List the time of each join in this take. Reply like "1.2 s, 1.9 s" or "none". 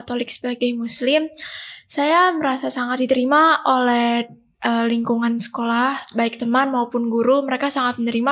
none